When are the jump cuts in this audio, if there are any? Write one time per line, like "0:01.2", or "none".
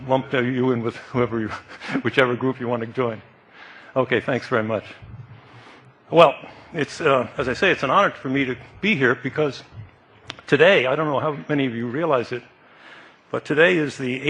none

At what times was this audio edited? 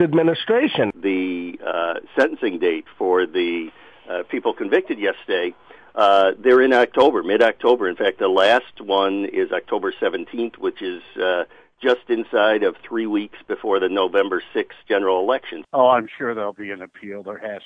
0:00.9
0:15.6

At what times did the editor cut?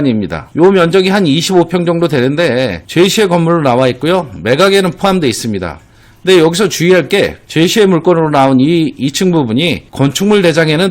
none

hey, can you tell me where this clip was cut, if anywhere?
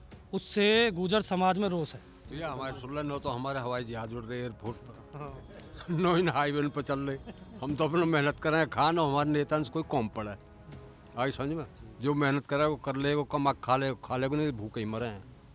0:02.3

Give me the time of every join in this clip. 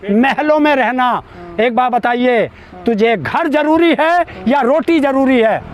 none

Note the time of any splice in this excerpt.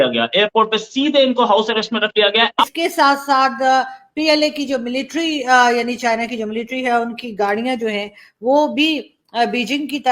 0:02.7

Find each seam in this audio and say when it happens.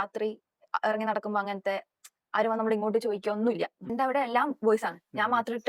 0:03.8

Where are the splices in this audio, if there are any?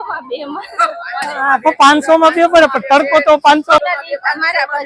0:03.8

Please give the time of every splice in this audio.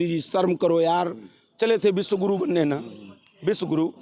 none

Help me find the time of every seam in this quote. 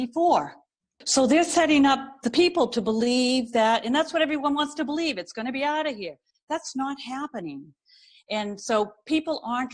0:01.0

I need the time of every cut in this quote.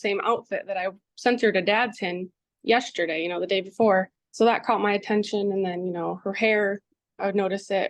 0:01.1
0:04.2

